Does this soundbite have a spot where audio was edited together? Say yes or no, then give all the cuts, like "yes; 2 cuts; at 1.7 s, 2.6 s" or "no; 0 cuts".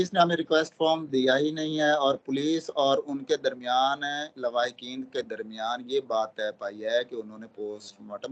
no; 0 cuts